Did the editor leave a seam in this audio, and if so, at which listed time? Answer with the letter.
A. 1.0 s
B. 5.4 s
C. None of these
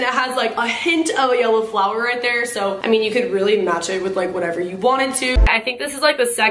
B